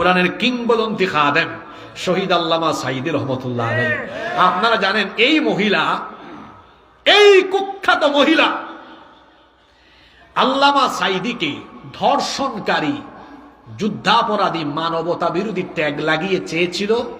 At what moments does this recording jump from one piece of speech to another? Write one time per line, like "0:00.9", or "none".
none